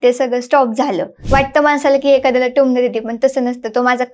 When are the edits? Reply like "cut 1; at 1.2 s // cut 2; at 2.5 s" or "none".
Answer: cut 1; at 1.2 s